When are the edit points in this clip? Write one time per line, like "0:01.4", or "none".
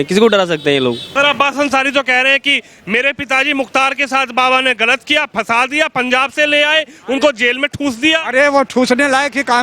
0:01.1